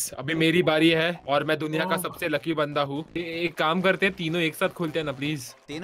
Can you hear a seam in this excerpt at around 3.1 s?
yes; 1 cut; at 3.1 s

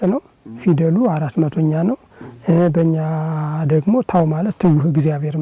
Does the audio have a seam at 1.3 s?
no; 0 cuts

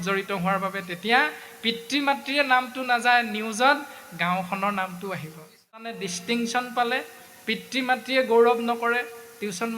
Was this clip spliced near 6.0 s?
yes; 1 cut; at 6.0 s

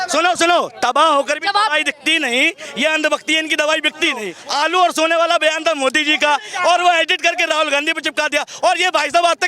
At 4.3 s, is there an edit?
yes; 1 cut; at 4.3 s

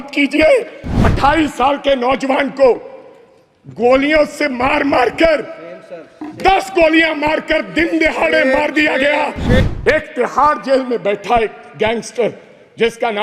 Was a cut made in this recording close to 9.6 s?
yes; 2 cuts; at 1.0 s, 9.6 s

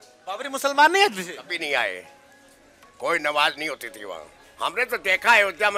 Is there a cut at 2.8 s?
no; 1 cut; at 4.4 s

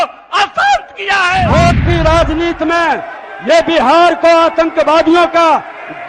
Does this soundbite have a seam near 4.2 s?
no; 1 cut; at 1.5 s

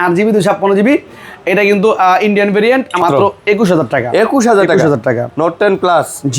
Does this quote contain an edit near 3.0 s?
yes; 1 cut; at 3.0 s

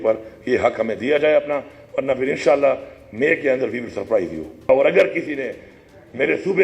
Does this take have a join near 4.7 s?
yes; 1 cut; at 4.7 s

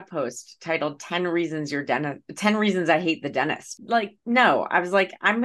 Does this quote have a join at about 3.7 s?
yes; 1 cut; at 3.7 s

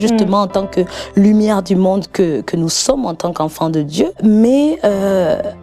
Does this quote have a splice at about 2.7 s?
no; 1 cut; at 4.2 s

